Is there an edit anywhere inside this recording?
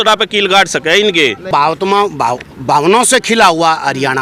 yes; 1 cut; at 1.5 s

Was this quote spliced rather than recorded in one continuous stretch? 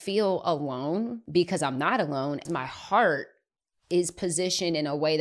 yes; 2 cuts; at 1.2 s, 2.4 s

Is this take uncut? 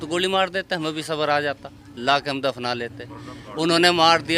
yes; 0 cuts

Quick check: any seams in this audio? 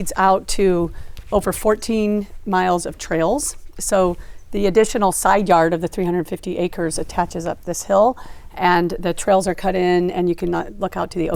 no; 0 cuts

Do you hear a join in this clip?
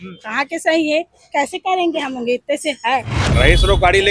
yes; 1 cut; at 3.2 s

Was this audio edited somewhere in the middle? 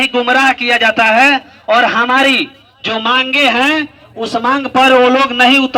no; 0 cuts

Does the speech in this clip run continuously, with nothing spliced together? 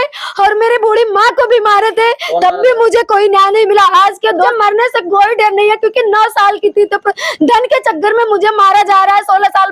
no; 1 cut; at 4.5 s

